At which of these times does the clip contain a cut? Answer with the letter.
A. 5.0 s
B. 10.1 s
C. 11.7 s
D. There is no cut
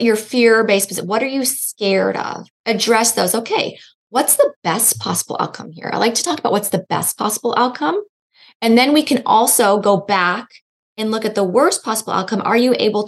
D